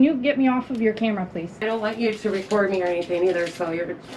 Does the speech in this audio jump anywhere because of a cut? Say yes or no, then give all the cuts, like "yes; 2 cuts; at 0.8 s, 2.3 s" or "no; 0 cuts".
yes; 1 cut; at 1.6 s